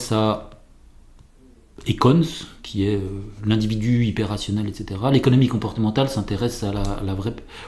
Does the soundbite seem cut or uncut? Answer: uncut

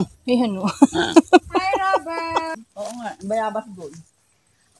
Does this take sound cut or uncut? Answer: cut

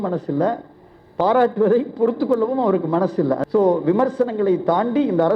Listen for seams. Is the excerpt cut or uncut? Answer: cut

